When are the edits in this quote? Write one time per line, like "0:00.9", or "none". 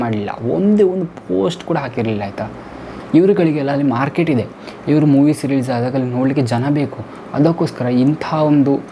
0:02.9